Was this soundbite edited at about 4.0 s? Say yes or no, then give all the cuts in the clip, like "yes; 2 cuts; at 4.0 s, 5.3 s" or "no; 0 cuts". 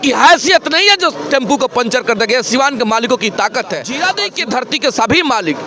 yes; 1 cut; at 4.0 s